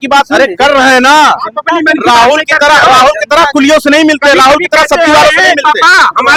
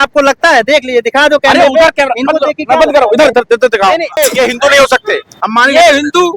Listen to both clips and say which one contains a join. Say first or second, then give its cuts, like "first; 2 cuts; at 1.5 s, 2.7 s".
second; 1 cut; at 4.2 s